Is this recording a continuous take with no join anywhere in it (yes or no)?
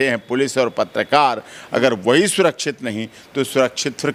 yes